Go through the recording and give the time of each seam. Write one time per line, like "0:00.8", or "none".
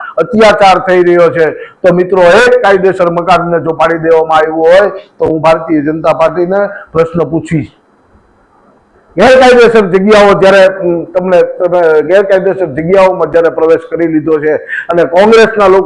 none